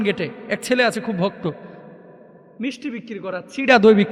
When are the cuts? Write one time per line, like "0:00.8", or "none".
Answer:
none

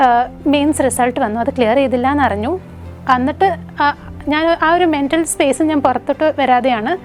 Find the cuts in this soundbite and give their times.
none

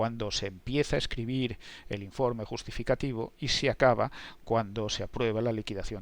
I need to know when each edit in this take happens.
none

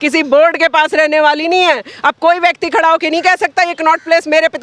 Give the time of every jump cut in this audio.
none

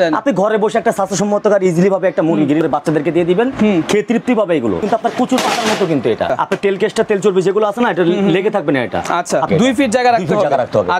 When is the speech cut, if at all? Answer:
0:02.6
0:04.8
0:06.3
0:09.5

